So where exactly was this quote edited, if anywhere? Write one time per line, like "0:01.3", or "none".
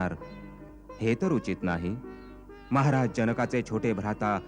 none